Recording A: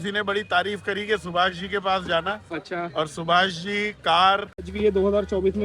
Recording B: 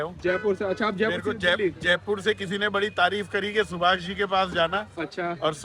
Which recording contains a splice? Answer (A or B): A